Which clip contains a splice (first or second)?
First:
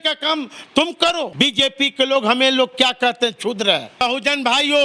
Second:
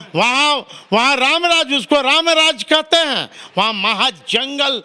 first